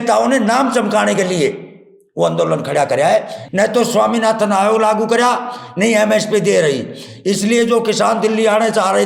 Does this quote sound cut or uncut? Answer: cut